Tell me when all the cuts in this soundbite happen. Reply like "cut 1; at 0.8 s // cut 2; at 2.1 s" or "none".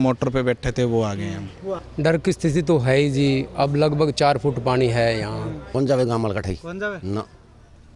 cut 1; at 1.9 s // cut 2; at 5.5 s